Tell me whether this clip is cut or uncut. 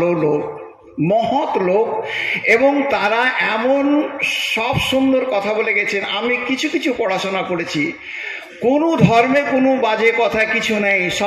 uncut